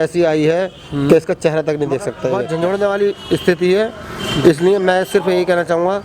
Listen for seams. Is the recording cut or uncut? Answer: cut